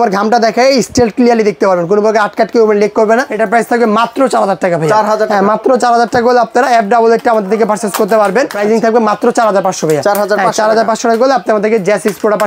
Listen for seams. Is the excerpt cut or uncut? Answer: cut